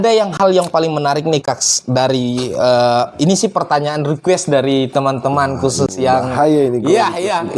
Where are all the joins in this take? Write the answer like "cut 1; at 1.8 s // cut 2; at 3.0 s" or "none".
none